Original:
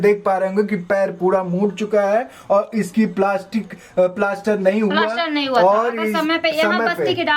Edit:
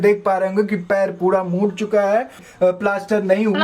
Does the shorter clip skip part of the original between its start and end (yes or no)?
yes